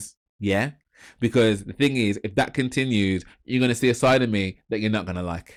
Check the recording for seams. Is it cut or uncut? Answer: uncut